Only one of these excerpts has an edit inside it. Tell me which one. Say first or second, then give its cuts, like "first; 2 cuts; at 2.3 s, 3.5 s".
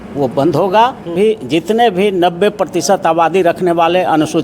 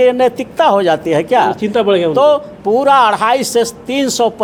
first; 1 cut; at 1.1 s